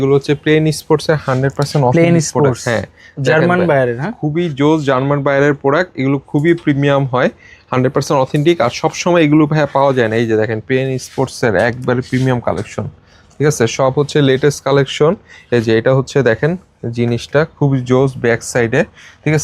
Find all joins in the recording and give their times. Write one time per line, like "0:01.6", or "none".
none